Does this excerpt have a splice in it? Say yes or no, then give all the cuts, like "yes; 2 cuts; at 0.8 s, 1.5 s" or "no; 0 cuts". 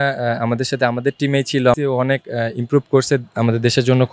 yes; 1 cut; at 1.8 s